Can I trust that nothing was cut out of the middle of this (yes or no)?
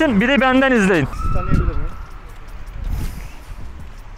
no